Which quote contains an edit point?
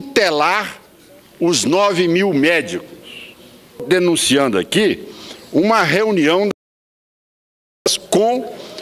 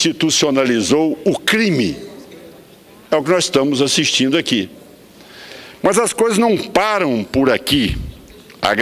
first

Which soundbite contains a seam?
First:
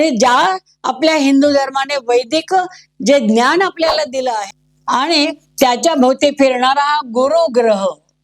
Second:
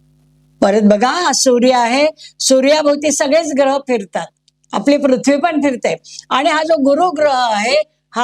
first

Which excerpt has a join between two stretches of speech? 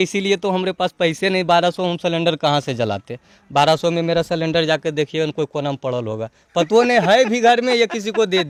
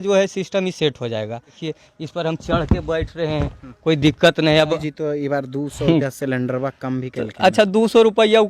second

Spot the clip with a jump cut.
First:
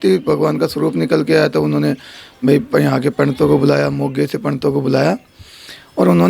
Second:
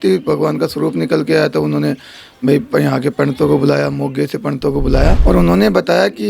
second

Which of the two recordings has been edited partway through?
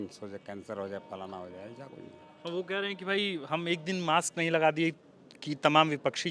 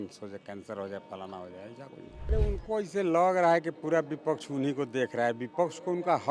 second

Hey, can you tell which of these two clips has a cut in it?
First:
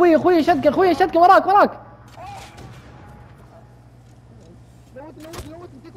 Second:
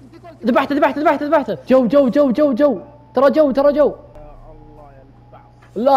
second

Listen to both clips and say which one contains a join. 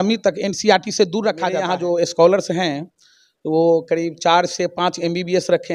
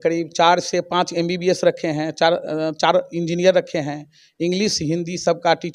first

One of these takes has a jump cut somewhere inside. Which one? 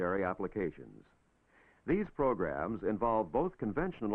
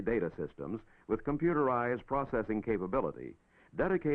first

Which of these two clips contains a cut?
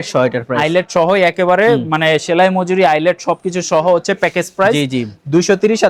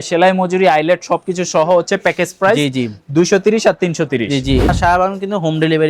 second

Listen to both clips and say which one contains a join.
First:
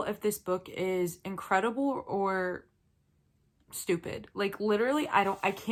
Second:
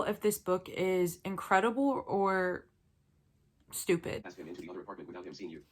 second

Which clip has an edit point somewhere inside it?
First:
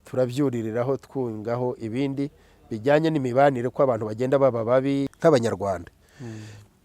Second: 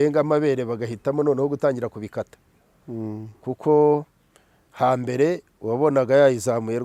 first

